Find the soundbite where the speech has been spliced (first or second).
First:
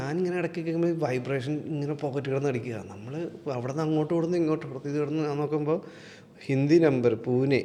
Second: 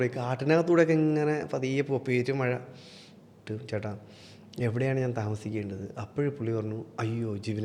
second